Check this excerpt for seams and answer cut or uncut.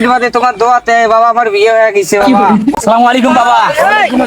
cut